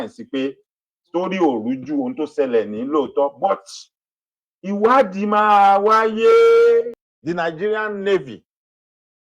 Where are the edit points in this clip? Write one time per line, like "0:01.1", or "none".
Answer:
0:07.1